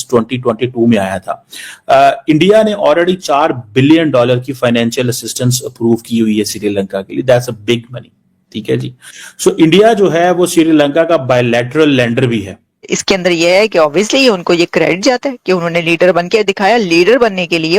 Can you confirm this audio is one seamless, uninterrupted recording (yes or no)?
no